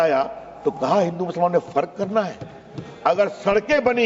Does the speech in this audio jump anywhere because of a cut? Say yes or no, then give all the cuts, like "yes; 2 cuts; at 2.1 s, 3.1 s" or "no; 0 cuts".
no; 0 cuts